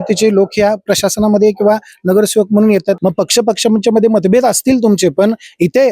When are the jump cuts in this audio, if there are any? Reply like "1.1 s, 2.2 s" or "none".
3.0 s